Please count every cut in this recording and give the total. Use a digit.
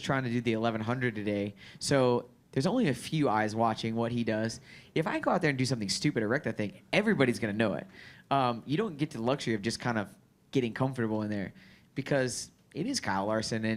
0